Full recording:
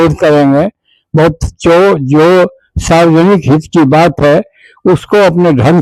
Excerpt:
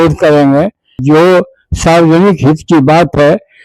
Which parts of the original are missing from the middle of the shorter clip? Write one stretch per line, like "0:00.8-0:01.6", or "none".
0:01.0-0:02.0